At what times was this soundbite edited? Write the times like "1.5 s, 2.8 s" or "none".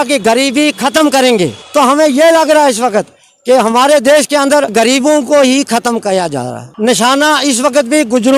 1.6 s, 4.7 s, 6.6 s